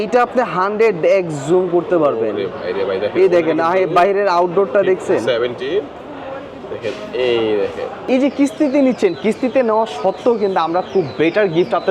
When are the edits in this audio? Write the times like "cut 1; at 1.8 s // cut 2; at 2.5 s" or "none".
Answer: cut 1; at 8.1 s